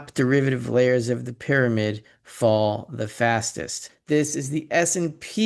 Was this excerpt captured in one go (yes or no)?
no